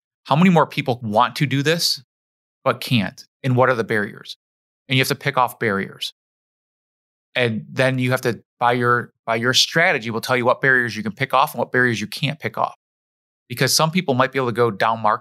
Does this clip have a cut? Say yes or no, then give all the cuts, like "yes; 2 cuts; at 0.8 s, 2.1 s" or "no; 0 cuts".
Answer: yes; 1 cut; at 1.0 s